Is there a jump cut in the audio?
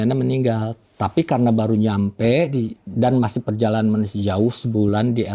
no; 0 cuts

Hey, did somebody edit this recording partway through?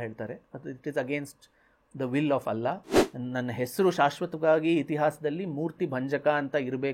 yes; 1 cut; at 2.9 s

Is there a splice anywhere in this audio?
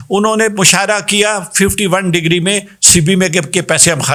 no; 0 cuts

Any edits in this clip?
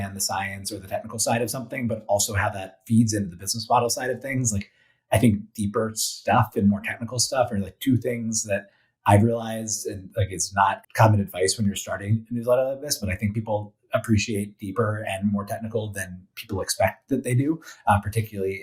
yes; 1 cut; at 10.8 s

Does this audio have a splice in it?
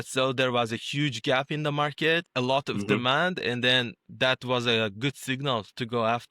yes; 1 cut; at 2.3 s

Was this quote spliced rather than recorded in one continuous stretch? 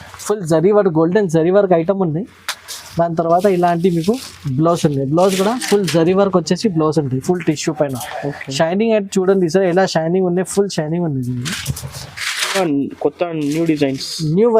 yes; 1 cut; at 12.6 s

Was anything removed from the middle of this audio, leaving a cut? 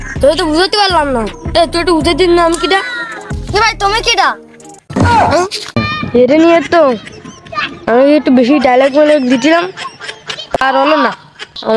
no; 0 cuts

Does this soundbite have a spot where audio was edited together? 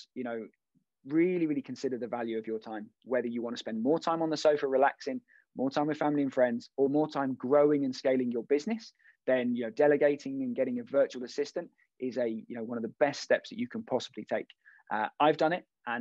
no; 0 cuts

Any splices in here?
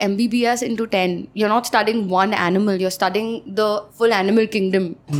no; 0 cuts

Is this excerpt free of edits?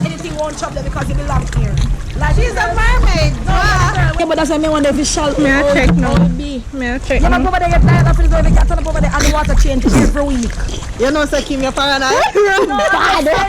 no; 1 cut; at 4.2 s

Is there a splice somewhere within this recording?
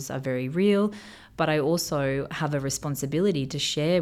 no; 0 cuts

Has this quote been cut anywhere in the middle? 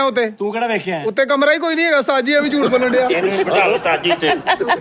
no; 0 cuts

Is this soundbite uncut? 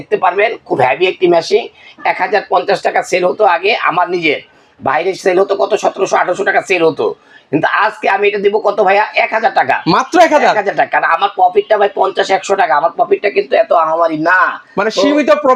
yes; 0 cuts

